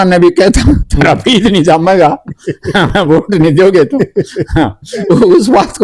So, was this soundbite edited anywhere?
no; 0 cuts

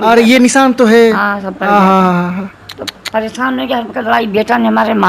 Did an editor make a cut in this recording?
no; 0 cuts

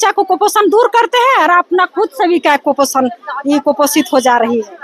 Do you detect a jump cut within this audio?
no; 0 cuts

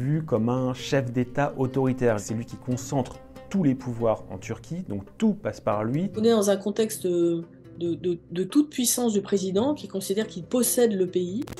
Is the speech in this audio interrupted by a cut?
yes; 2 cuts; at 2.2 s, 6.1 s

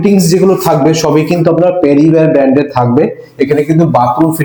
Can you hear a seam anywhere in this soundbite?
no; 0 cuts

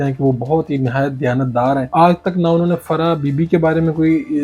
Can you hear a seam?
yes; 1 cut; at 1.9 s

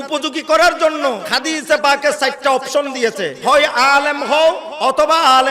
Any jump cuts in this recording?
yes; 3 cuts; at 1.3 s, 3.3 s, 4.7 s

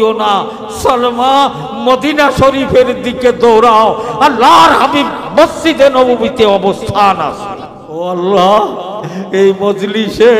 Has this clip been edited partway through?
yes; 1 cut; at 8.0 s

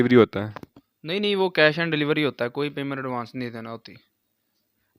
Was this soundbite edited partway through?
no; 0 cuts

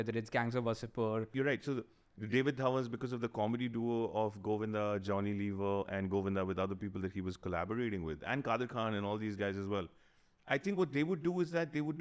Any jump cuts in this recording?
yes; 1 cut; at 1.3 s

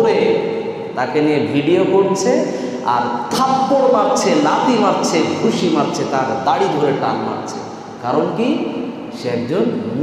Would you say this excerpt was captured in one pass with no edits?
yes; 0 cuts

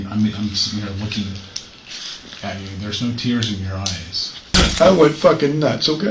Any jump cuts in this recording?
yes; 1 cut; at 4.5 s

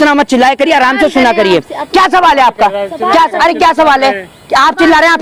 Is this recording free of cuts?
yes; 0 cuts

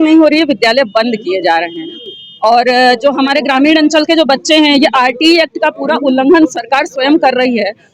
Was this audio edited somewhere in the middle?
no; 0 cuts

